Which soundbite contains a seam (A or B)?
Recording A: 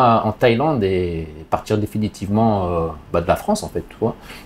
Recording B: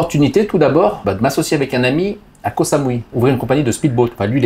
B